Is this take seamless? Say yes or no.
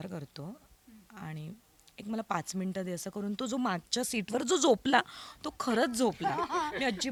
yes